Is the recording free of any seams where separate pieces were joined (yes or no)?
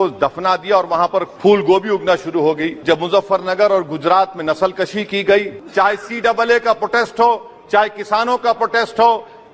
no